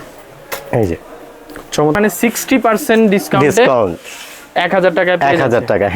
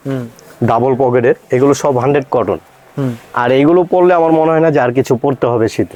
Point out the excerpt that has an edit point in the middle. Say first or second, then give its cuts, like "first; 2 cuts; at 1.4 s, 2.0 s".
first; 1 cut; at 2.0 s